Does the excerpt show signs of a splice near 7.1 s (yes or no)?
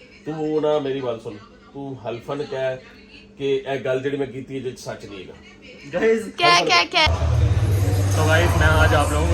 yes